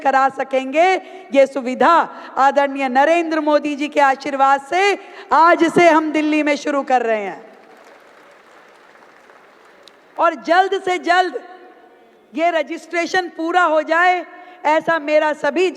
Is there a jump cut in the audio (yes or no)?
no